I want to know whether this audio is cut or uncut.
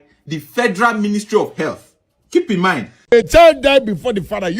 cut